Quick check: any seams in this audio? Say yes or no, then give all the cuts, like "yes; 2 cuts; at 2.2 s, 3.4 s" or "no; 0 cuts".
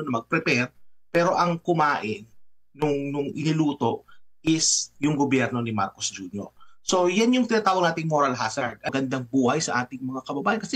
yes; 1 cut; at 8.9 s